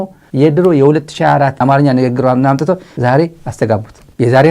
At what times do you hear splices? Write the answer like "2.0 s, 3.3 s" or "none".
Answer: 1.6 s